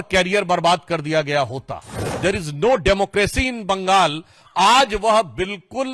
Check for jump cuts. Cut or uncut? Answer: cut